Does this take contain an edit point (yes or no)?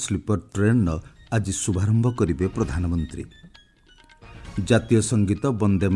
no